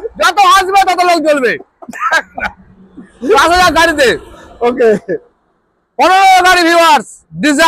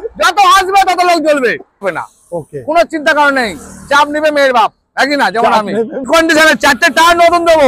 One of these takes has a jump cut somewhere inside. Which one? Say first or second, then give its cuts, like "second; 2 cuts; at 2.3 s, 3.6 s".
second; 2 cuts; at 1.8 s, 6.1 s